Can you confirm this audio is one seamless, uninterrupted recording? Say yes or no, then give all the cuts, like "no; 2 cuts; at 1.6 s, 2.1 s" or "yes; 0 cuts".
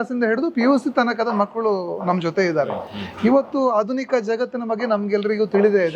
yes; 0 cuts